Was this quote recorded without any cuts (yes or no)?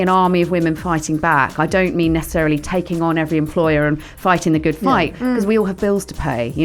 yes